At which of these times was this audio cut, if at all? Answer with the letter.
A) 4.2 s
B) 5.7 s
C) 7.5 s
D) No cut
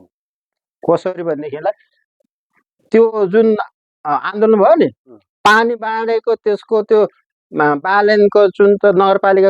D